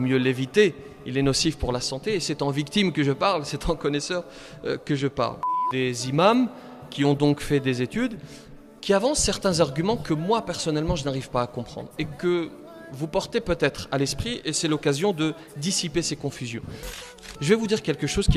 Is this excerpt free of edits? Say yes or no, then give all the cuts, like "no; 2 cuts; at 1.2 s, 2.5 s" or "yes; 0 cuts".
no; 2 cuts; at 5.6 s, 16.9 s